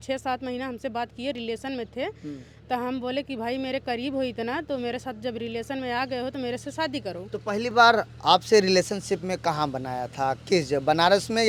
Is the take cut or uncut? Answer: uncut